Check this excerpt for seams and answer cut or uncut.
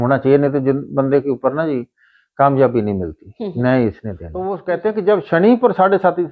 cut